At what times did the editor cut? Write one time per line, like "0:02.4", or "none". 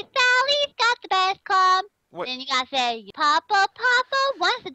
0:03.1